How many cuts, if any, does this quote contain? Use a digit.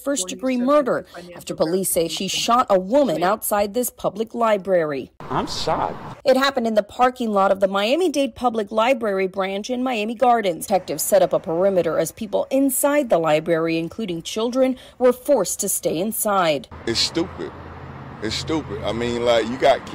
1